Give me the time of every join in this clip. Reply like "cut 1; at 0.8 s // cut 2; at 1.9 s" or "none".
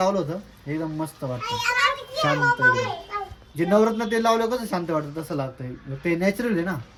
none